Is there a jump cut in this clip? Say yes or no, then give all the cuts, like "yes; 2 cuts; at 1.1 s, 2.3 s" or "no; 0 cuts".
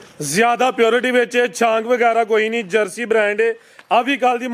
no; 0 cuts